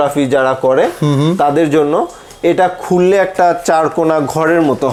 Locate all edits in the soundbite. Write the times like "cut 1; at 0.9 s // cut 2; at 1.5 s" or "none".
none